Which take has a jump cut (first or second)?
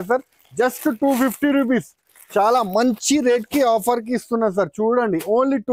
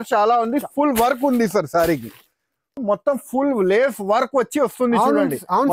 second